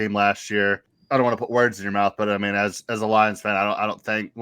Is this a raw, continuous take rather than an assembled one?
no; 1 cut; at 0.9 s

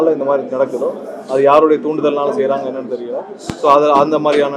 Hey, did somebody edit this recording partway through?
no; 0 cuts

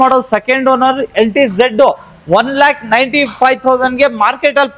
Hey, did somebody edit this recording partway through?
no; 0 cuts

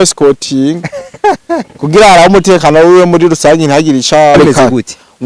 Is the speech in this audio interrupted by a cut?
yes; 1 cut; at 4.3 s

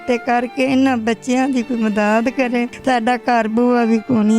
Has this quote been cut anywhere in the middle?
yes; 1 cut; at 2.7 s

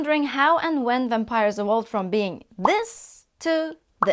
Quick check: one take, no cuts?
yes; 0 cuts

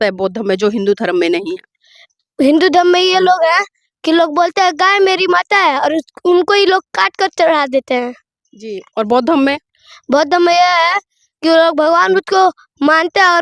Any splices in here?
no; 0 cuts

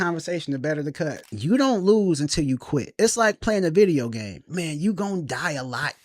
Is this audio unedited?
no; 3 cuts; at 1.2 s, 2.9 s, 4.5 s

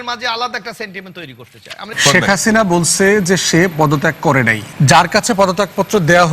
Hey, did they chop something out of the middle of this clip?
yes; 2 cuts; at 1.8 s, 4.6 s

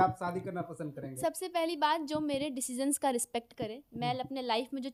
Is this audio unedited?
yes; 0 cuts

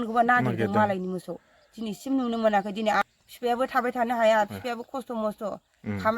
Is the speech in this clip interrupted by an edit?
yes; 1 cut; at 3.0 s

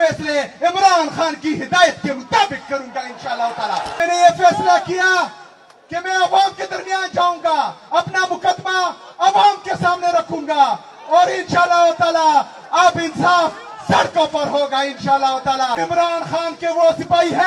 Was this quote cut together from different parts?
yes; 2 cuts; at 4.0 s, 15.8 s

